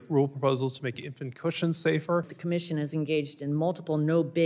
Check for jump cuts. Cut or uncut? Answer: cut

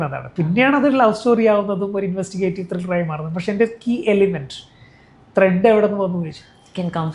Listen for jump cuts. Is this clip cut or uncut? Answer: uncut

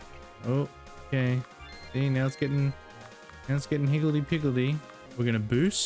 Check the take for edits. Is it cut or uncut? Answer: cut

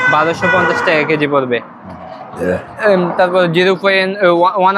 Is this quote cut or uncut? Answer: uncut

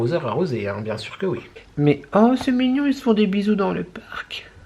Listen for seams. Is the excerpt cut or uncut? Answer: cut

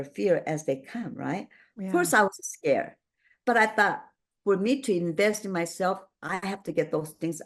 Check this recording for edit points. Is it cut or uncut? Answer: uncut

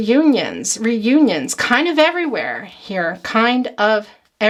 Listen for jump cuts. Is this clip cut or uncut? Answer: uncut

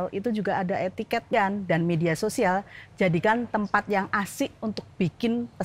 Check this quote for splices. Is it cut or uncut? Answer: cut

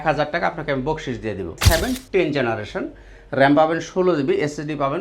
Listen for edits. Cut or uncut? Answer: cut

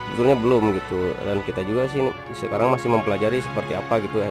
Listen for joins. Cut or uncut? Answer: uncut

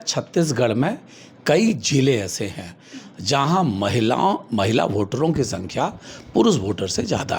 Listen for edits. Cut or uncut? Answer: uncut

